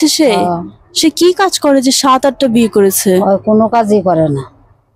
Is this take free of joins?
yes; 0 cuts

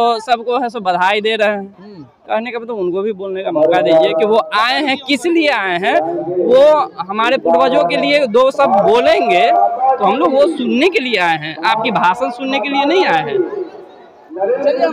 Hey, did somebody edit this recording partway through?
no; 0 cuts

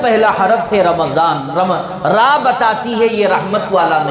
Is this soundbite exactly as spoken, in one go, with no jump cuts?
yes; 0 cuts

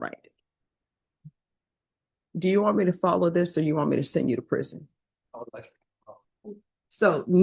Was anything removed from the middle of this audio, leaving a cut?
yes; 1 cut; at 6.3 s

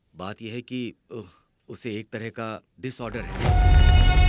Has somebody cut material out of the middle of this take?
yes; 1 cut; at 3.3 s

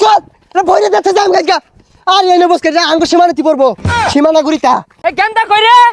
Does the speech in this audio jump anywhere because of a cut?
no; 0 cuts

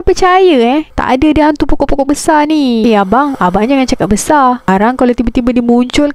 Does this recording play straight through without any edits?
no; 2 cuts; at 0.9 s, 2.8 s

